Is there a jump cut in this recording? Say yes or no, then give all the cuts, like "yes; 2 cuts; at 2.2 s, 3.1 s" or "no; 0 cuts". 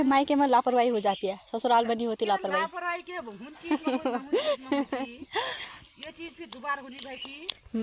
no; 0 cuts